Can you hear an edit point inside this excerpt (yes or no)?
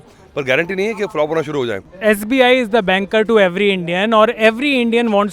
yes